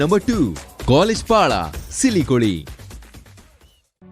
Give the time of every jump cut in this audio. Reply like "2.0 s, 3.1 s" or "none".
none

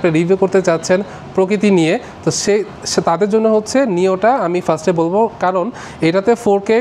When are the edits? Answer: none

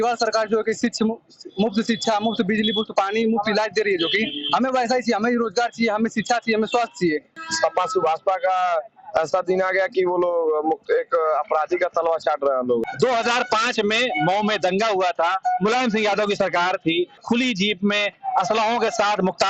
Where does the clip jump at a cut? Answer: 7.3 s, 12.8 s, 17.2 s

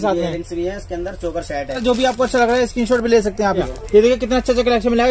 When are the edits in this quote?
1.8 s, 3.8 s

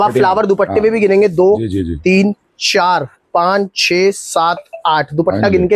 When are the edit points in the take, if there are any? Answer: none

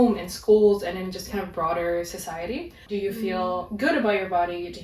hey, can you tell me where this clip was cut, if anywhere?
2.9 s

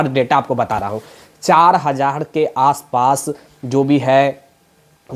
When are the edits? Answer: none

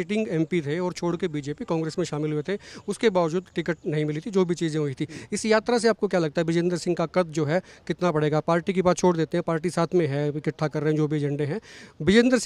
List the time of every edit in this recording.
none

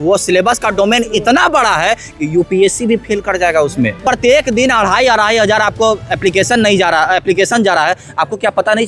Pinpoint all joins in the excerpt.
4.0 s

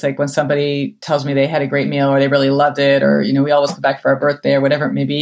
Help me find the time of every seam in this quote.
none

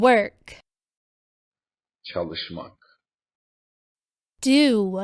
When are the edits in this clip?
none

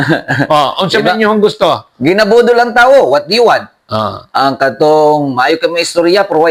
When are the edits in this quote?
none

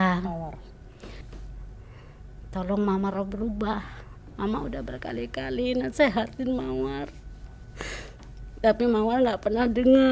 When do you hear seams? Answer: 1.2 s

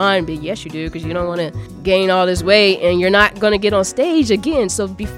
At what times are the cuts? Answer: 1.7 s

